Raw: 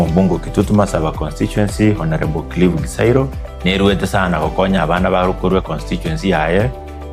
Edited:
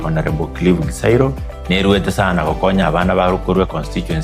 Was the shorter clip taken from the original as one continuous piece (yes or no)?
yes